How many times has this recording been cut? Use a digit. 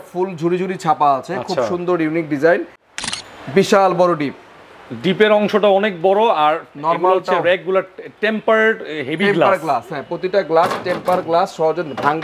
1